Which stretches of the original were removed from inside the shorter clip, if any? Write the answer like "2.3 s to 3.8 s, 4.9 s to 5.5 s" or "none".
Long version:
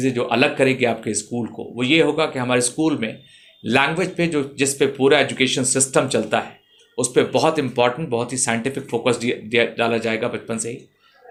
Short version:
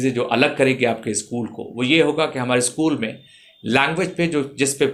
none